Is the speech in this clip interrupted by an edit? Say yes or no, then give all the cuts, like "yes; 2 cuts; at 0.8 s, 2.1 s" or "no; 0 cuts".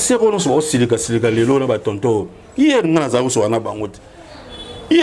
no; 0 cuts